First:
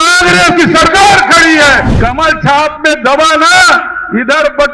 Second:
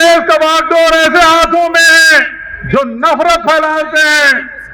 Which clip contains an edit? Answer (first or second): first